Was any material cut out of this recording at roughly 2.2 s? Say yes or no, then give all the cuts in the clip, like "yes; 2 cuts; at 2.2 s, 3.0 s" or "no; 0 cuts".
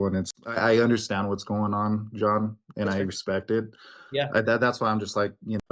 no; 0 cuts